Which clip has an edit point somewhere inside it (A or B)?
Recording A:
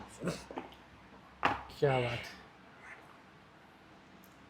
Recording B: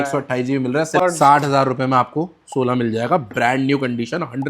B